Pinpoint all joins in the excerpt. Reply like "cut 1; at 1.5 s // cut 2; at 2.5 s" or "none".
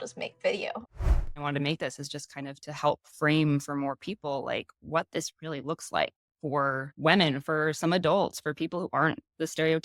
cut 1; at 1.0 s